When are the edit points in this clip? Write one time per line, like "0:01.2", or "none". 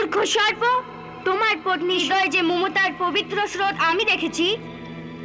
0:02.0